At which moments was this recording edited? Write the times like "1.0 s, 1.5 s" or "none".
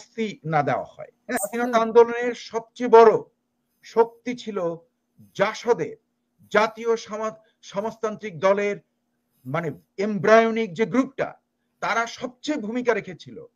1.4 s